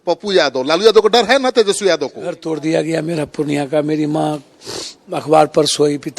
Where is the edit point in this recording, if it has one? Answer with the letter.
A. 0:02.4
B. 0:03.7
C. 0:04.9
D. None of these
A